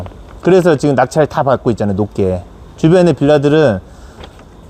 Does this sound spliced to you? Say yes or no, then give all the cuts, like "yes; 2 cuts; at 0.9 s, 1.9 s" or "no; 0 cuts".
no; 0 cuts